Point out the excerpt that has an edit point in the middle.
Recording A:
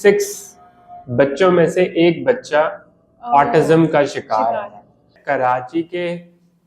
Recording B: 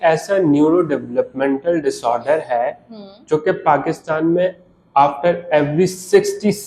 A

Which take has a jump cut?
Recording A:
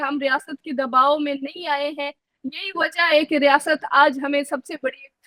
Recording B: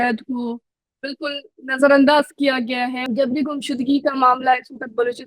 B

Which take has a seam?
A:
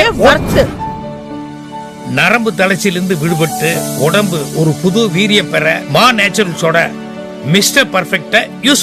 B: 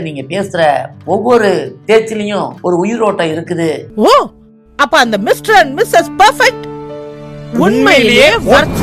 B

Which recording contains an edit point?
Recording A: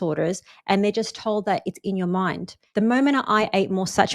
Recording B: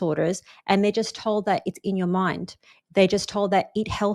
A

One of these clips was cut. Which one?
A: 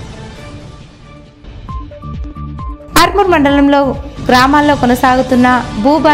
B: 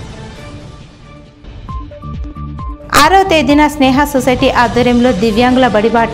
A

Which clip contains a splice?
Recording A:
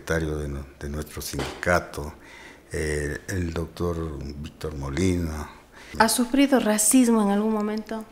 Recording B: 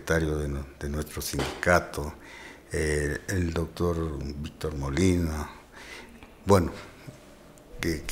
A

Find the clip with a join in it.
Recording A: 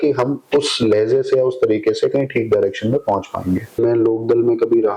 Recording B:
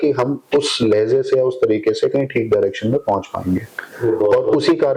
A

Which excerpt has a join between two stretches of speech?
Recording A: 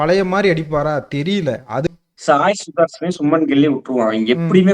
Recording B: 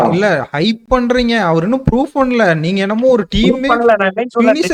A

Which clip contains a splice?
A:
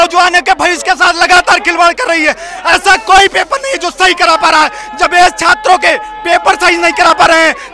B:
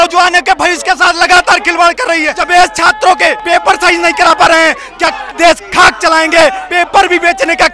B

